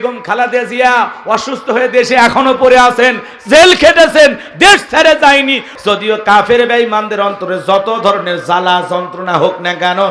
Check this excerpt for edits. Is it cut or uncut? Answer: cut